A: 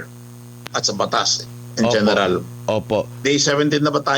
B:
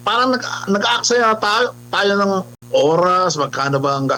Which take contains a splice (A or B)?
A